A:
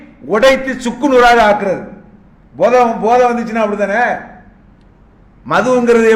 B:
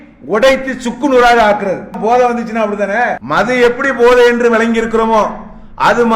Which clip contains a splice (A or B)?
B